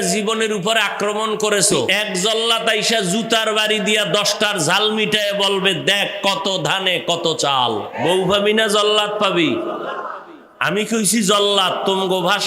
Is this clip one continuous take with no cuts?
no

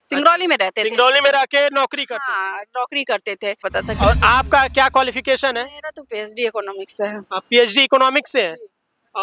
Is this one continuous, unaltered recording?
no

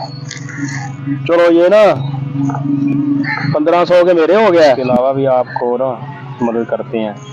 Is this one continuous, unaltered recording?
no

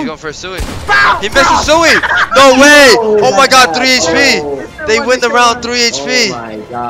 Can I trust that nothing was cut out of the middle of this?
yes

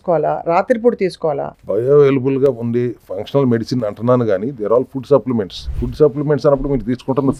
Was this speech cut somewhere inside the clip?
no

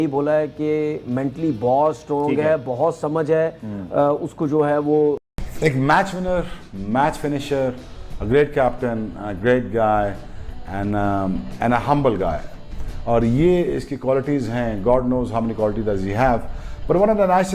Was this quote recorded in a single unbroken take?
no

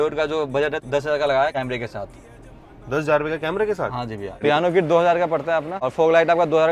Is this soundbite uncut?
no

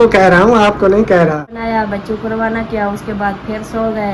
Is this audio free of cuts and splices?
no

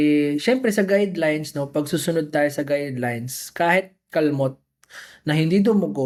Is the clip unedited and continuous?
yes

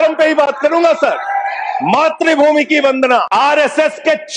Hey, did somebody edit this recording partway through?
yes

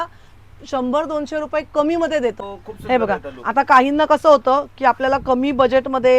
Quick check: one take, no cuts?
no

